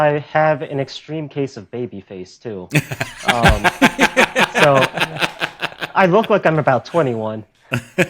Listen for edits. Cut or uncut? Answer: uncut